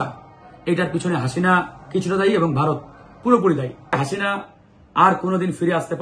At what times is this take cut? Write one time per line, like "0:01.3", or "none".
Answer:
0:04.0